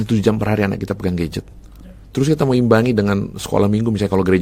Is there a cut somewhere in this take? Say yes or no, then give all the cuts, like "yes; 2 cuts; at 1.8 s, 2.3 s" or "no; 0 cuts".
no; 0 cuts